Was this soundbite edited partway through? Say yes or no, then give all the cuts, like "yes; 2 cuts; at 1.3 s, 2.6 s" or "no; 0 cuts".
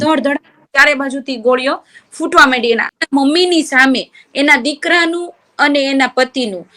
yes; 1 cut; at 2.9 s